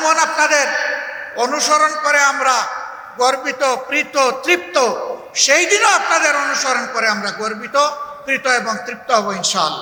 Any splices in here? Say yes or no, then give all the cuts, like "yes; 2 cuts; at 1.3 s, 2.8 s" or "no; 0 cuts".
no; 0 cuts